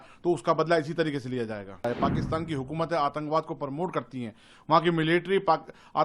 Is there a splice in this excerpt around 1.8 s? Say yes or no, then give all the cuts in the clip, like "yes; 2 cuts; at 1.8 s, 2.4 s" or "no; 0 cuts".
yes; 1 cut; at 1.8 s